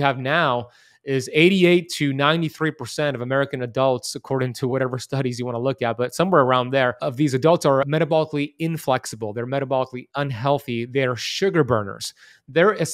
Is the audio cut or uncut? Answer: cut